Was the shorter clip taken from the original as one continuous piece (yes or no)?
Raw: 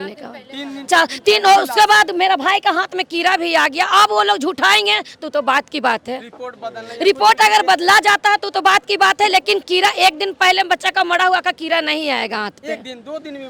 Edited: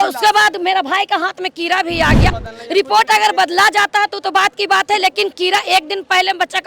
no